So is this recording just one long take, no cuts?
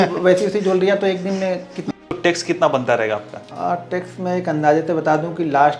no; 2 cuts; at 1.9 s, 3.4 s

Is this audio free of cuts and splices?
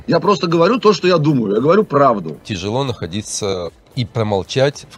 no; 2 cuts; at 2.4 s, 3.5 s

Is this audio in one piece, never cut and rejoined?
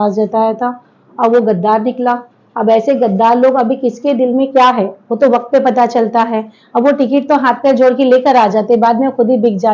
yes; 0 cuts

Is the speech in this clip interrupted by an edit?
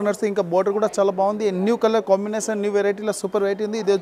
no; 0 cuts

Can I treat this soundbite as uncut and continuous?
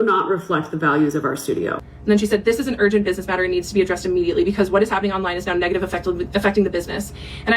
no; 2 cuts; at 1.9 s, 5.1 s

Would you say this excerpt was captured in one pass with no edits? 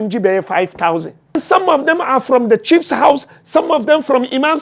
no; 1 cut; at 1.4 s

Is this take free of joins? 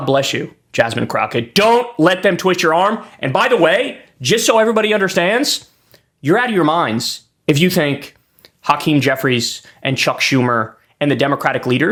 yes; 0 cuts

